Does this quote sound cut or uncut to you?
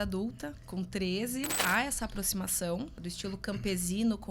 cut